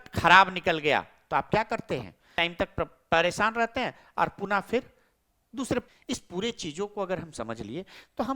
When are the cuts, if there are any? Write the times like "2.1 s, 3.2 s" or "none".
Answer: 2.3 s, 5.9 s